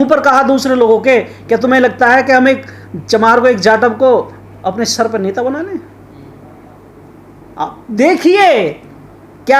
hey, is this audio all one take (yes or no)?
yes